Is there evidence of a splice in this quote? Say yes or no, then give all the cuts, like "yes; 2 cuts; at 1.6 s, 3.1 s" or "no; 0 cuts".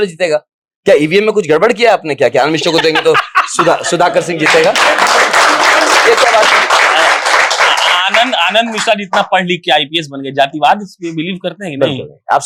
no; 0 cuts